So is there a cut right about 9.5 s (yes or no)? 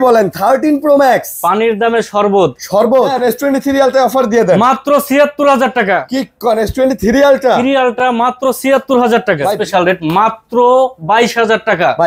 yes